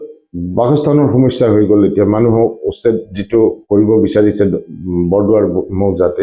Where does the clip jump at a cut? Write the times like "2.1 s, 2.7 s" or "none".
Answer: none